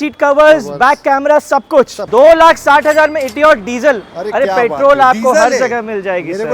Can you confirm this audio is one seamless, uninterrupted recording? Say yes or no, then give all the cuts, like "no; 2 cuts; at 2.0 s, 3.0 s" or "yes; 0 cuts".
no; 1 cut; at 2.0 s